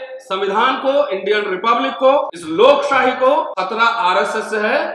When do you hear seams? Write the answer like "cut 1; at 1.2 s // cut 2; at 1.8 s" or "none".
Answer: cut 1; at 2.4 s // cut 2; at 3.5 s